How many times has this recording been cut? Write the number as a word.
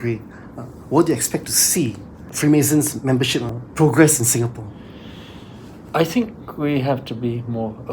two